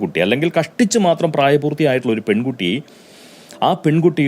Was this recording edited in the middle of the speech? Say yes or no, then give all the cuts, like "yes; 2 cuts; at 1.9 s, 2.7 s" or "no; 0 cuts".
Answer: no; 0 cuts